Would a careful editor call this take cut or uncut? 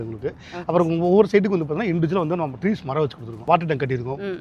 cut